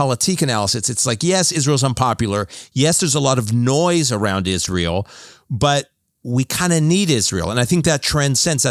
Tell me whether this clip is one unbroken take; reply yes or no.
yes